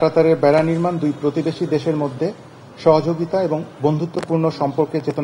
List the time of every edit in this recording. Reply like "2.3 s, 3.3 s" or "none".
none

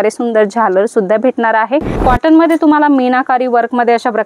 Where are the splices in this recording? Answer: 1.9 s

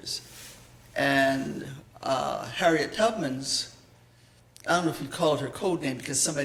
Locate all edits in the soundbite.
none

